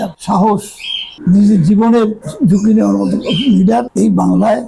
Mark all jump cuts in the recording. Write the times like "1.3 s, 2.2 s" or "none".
none